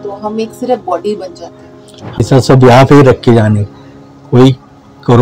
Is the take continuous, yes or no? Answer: no